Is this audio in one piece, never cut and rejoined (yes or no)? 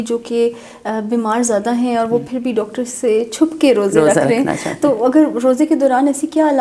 yes